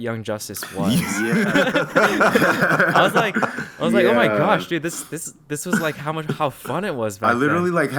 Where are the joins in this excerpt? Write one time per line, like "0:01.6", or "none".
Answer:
none